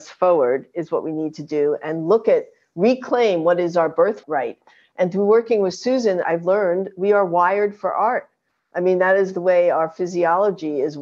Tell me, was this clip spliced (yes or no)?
yes